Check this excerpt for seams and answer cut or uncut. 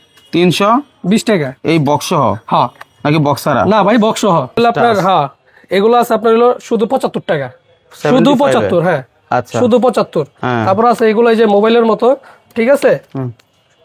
cut